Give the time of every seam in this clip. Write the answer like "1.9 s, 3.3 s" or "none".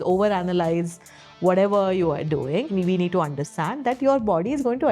2.7 s

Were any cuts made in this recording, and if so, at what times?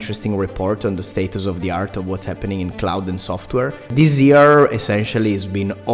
3.9 s

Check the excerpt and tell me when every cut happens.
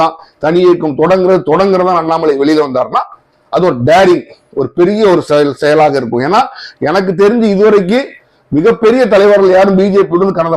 none

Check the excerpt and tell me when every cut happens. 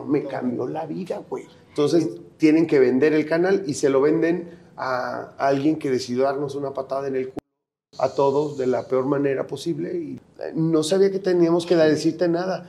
1.6 s, 10.2 s

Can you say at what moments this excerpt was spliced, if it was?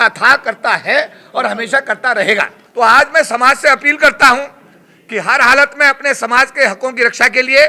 2.6 s

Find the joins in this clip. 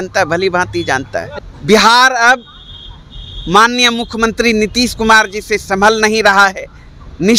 1.3 s

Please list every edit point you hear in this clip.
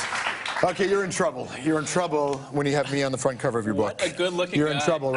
4.1 s

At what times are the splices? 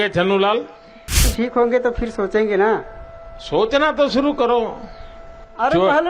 1.2 s

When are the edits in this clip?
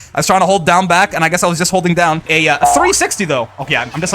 2.3 s

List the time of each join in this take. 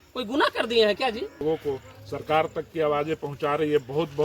1.4 s

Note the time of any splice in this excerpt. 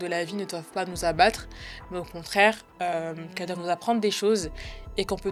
none

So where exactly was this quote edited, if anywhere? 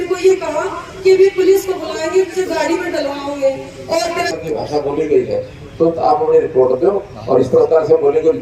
4.3 s

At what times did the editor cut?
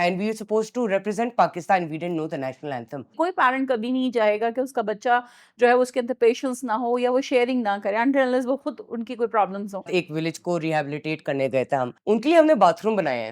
3.1 s, 9.9 s, 12.0 s

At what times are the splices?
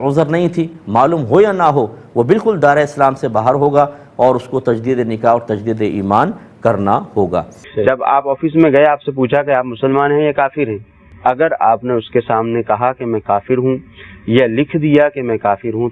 7.6 s

